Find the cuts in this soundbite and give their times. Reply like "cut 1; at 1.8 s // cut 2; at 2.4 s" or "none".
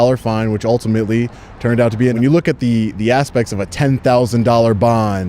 cut 1; at 2.1 s